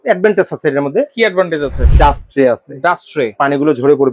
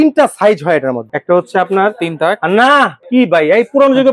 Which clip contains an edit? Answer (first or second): second